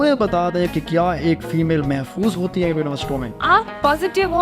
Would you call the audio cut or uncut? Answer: cut